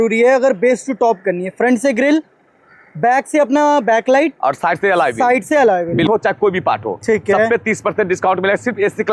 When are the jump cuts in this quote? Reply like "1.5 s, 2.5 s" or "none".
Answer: 6.1 s